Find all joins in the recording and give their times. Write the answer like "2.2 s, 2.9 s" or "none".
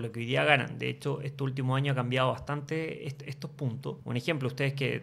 4.0 s